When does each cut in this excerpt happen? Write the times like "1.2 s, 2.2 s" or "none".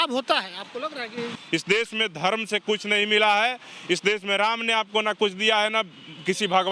1.3 s